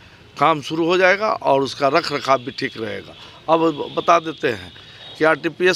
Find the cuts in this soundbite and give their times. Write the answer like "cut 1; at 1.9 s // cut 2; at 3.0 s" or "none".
none